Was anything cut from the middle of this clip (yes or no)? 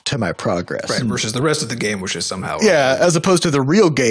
yes